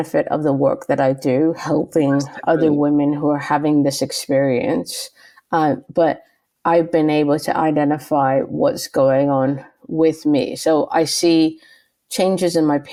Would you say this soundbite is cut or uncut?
uncut